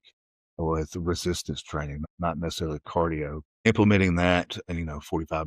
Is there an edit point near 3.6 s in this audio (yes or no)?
yes